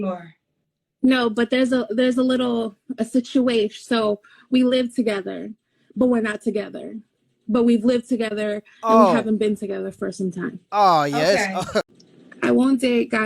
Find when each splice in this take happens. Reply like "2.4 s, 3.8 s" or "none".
12.0 s